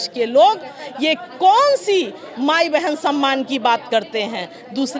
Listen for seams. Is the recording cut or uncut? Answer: uncut